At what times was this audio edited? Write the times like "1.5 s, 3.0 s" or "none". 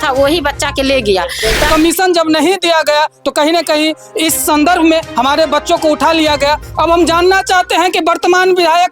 1.7 s